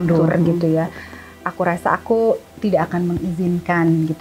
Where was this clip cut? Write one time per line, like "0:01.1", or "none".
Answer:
none